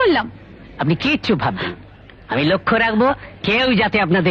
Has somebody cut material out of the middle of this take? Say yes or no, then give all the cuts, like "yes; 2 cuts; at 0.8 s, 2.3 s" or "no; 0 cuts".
no; 0 cuts